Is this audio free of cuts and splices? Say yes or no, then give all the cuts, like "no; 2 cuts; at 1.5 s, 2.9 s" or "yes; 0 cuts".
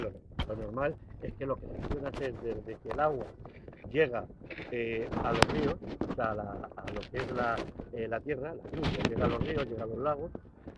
yes; 0 cuts